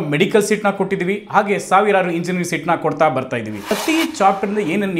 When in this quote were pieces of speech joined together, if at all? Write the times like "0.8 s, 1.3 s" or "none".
3.7 s